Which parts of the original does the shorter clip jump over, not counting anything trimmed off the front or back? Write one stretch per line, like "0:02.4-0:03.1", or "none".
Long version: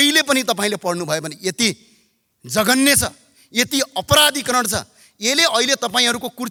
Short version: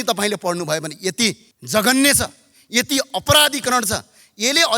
0:01.9-0:02.3